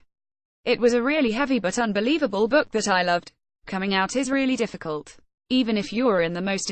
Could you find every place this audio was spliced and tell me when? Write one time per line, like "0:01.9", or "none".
0:03.6